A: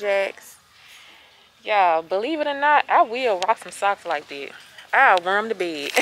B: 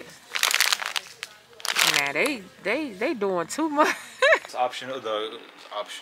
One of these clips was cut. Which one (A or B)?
B